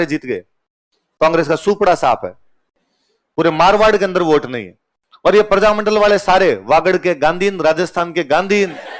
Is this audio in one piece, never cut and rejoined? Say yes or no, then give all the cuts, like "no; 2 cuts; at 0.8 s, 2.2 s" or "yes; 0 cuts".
yes; 0 cuts